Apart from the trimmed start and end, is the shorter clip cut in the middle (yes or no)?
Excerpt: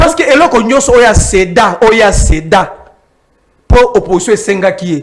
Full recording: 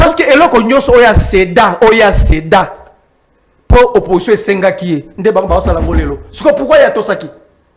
no